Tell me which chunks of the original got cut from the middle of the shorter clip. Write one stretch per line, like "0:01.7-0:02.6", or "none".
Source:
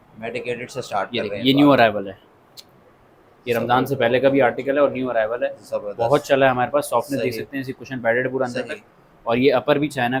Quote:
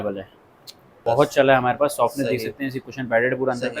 0:02.8-0:05.9

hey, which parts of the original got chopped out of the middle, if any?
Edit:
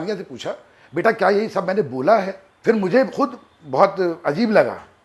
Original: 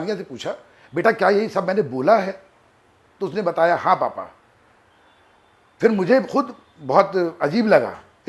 0:02.4-0:05.6

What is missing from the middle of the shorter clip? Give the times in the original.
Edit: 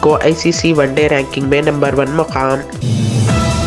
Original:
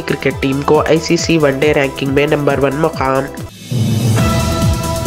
0:03.4-0:03.6

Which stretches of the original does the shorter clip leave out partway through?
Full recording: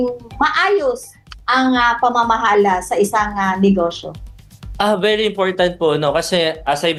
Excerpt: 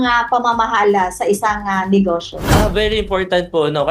0:04.1-0:04.6

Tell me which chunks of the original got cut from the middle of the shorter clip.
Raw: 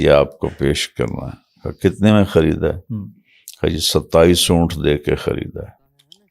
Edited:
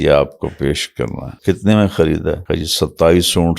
0:01.3-0:01.6
0:02.8-0:03.5

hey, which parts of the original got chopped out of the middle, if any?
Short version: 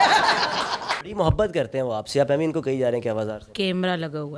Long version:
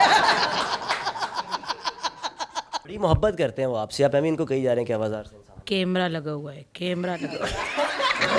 0:01.0-0:02.9
0:05.3-0:05.6

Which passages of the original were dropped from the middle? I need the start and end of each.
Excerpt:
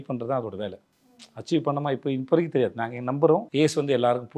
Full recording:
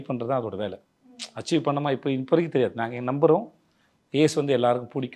0:03.5-0:04.1

